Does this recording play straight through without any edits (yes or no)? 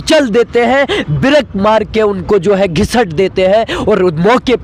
yes